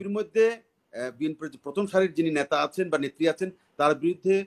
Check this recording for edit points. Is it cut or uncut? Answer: uncut